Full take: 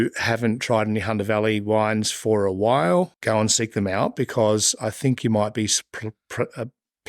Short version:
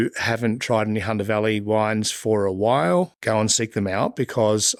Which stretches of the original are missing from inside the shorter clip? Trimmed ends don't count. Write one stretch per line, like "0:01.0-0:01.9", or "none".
none